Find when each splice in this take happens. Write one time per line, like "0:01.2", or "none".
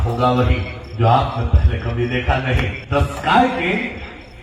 0:02.8